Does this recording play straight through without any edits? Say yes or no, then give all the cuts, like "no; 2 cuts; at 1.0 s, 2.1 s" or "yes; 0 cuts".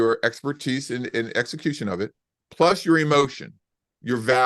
no; 1 cut; at 3.4 s